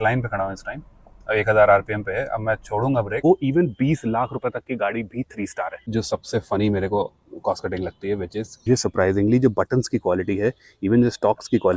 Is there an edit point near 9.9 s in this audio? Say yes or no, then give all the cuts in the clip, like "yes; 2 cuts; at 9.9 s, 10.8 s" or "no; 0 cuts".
no; 3 cuts; at 3.2 s, 5.9 s, 8.6 s